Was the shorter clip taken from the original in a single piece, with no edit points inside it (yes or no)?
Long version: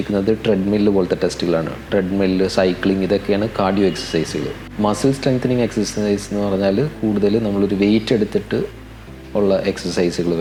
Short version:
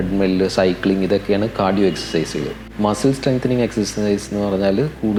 yes